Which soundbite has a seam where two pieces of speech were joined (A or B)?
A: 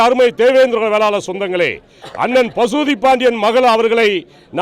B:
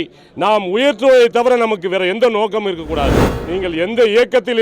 B